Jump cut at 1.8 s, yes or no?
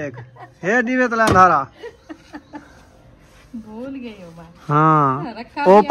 no